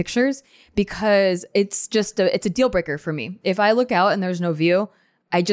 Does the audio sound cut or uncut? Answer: uncut